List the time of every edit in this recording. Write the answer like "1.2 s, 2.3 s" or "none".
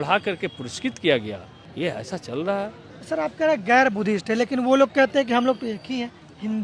none

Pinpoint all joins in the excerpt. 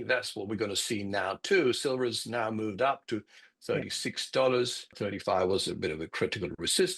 4.8 s

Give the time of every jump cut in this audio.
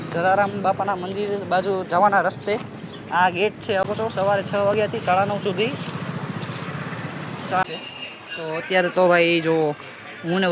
3.8 s, 7.6 s

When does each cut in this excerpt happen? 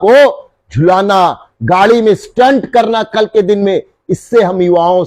none

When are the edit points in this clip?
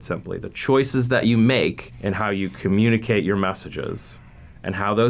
1.9 s

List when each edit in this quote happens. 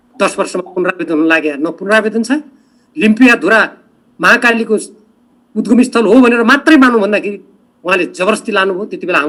none

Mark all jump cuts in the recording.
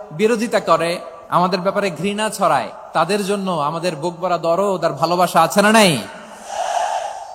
1.1 s

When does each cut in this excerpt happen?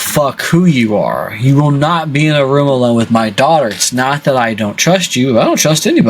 none

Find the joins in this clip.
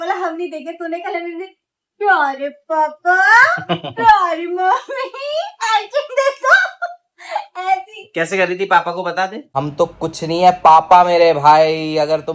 9.5 s

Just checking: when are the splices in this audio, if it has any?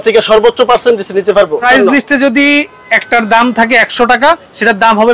1.7 s

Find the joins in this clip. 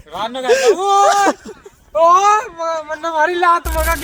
none

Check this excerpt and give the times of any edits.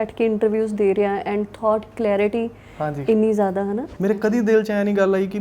3.9 s

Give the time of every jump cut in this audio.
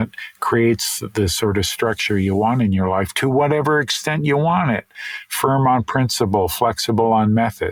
none

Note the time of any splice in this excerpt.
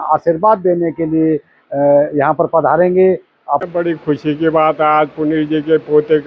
3.6 s

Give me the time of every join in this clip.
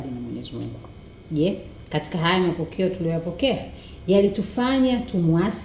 none

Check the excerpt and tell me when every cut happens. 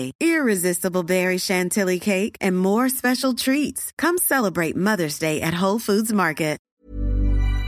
6.7 s

